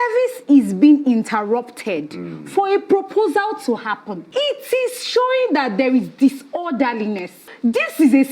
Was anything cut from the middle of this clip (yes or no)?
yes